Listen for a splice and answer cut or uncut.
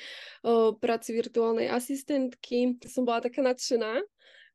cut